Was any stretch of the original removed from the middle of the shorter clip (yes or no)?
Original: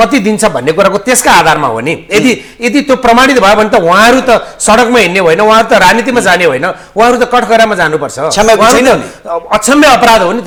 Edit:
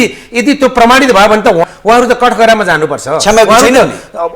yes